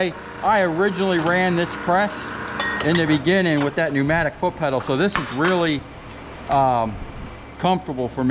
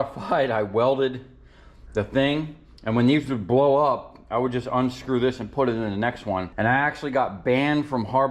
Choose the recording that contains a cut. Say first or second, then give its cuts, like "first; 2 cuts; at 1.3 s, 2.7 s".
second; 1 cut; at 6.5 s